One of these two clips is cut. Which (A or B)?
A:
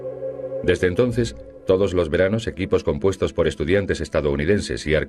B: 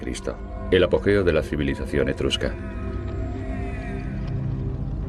A